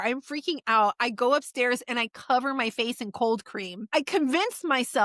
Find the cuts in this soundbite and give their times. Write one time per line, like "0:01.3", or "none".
0:03.9